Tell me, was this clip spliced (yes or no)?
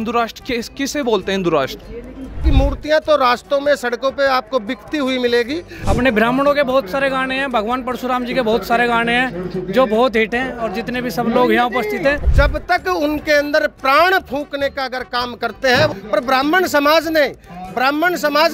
yes